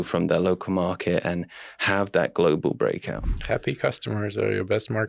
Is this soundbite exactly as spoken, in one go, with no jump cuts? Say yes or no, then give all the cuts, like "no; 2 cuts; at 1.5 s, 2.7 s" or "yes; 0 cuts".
no; 1 cut; at 3.3 s